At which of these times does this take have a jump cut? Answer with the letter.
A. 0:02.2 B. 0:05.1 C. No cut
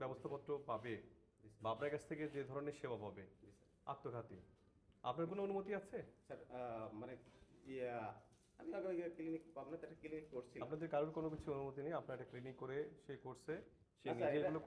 C